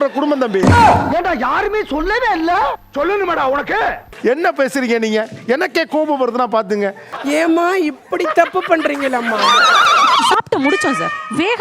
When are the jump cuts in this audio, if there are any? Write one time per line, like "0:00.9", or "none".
0:10.2